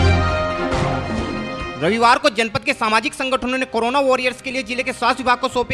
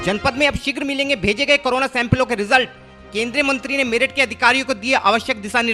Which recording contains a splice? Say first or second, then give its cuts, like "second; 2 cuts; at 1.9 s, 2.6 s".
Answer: first; 1 cut; at 1.4 s